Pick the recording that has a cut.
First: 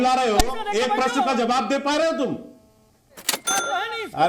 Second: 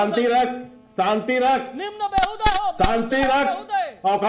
first; 1 cut; at 3.3 s

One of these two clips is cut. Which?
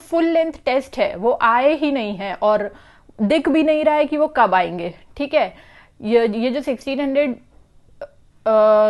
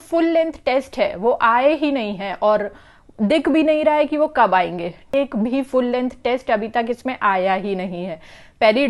second; 1 cut; at 5.1 s

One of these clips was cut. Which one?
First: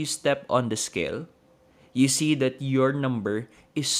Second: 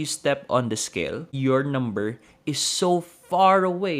second; 1 cut; at 1.3 s

